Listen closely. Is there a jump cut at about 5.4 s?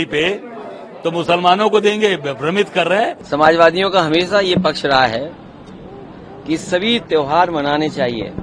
no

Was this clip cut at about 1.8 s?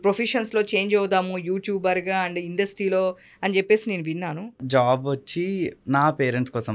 no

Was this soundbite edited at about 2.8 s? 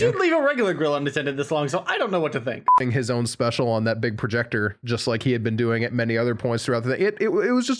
yes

